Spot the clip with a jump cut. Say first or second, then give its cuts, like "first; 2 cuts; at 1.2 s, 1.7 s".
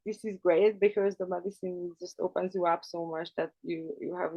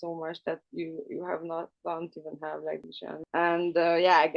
second; 1 cut; at 3.2 s